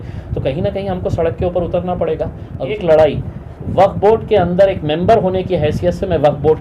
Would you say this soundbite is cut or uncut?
cut